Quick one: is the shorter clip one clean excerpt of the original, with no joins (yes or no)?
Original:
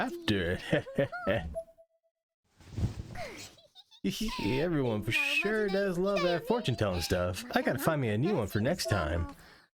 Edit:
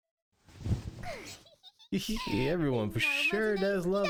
yes